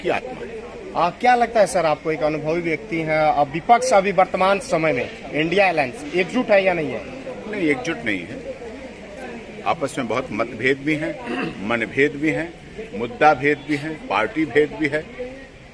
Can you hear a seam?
no; 0 cuts

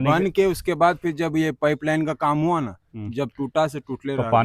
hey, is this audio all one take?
yes; 0 cuts

